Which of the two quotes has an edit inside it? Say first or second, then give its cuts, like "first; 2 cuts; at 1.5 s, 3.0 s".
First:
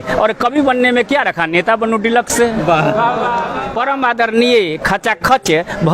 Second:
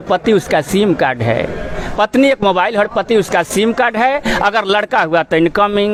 first; 1 cut; at 3.5 s